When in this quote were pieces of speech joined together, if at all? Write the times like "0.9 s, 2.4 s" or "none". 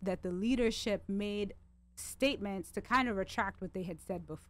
none